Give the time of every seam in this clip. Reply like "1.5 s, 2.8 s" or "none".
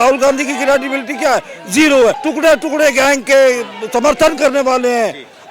2.2 s